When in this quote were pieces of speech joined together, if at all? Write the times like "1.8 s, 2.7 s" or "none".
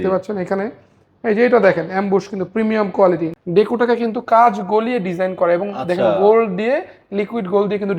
3.3 s